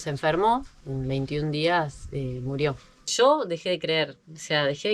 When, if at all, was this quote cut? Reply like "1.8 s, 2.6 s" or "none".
3.1 s

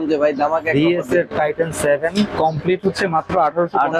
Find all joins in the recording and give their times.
none

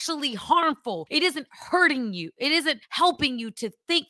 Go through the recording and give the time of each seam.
none

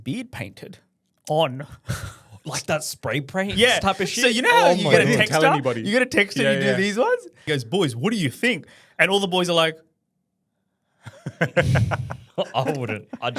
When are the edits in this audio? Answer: 7.5 s

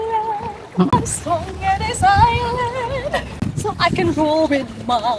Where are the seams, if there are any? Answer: 0.9 s, 3.4 s

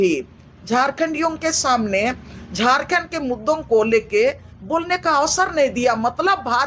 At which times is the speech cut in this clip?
none

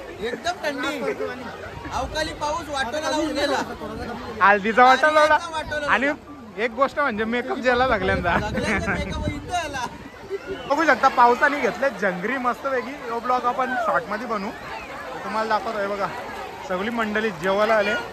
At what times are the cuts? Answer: 10.5 s

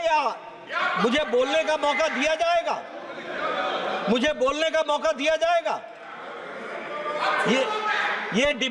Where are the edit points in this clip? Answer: none

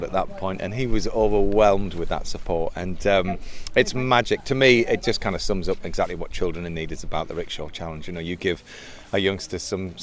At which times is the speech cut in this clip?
none

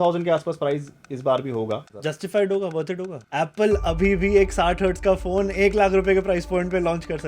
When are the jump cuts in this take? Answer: 1.9 s, 3.2 s

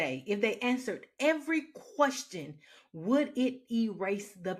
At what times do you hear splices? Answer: none

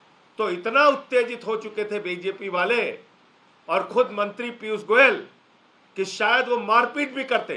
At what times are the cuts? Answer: none

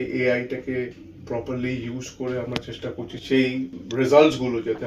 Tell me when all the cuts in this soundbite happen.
3.2 s, 3.8 s

